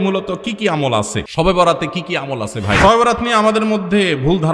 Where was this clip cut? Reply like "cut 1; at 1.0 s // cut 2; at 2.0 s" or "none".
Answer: cut 1; at 1.2 s // cut 2; at 2.8 s